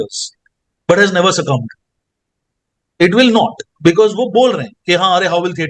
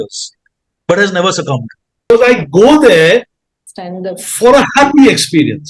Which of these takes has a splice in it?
second; 1 cut; at 2.1 s

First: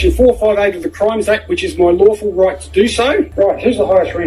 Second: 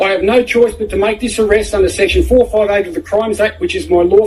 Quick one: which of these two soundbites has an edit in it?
first; 1 cut; at 3.3 s

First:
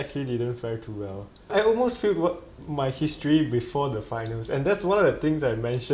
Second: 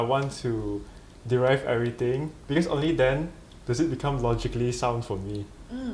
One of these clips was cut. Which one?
first; 1 cut; at 1.4 s

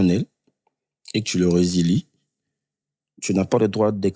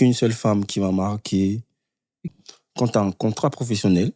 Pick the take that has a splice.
second; 1 cut; at 2.2 s

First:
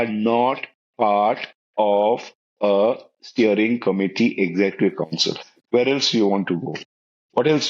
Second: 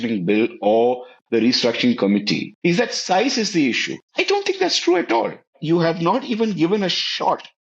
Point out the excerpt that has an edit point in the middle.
second; 3 cuts; at 2.5 s, 3.9 s, 5.5 s

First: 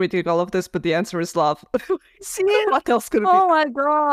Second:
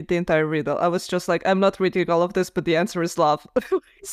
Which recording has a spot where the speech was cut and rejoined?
first; 1 cut; at 3.2 s

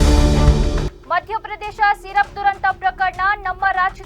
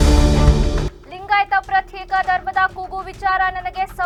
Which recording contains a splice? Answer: first; 1 cut; at 1.1 s

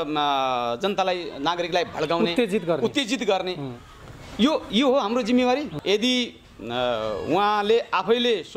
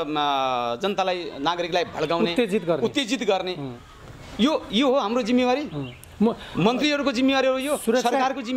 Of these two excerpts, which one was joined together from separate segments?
first; 1 cut; at 5.8 s

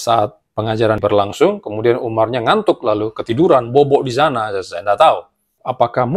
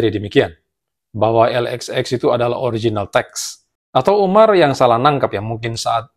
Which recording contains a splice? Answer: first; 1 cut; at 1.0 s

